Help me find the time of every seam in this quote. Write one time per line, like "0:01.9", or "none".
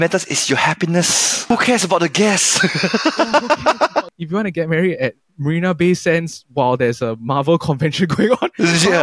0:01.3
0:04.2